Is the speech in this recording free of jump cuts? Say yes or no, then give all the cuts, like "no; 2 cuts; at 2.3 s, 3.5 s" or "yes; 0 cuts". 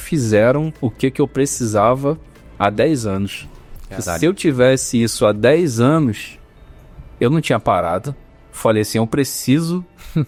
yes; 0 cuts